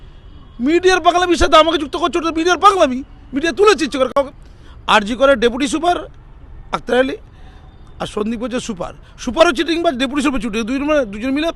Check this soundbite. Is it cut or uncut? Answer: cut